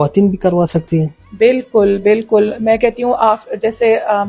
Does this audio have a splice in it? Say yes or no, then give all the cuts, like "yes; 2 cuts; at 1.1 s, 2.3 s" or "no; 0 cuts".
no; 0 cuts